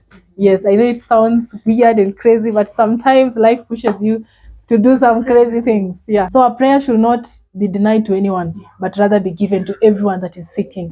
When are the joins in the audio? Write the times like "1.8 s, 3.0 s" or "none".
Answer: 6.3 s